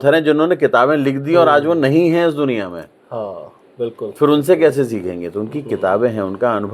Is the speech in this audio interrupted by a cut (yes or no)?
no